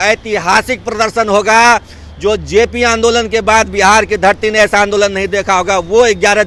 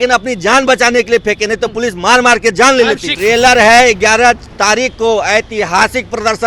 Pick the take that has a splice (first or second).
second